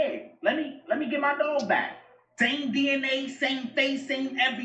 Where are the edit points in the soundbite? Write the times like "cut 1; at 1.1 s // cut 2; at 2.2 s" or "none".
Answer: none